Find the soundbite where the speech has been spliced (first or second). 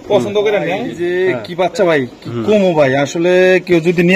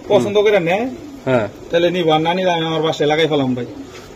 first